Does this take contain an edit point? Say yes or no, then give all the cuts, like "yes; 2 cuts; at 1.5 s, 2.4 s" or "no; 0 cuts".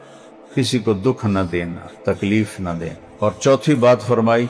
yes; 1 cut; at 3.0 s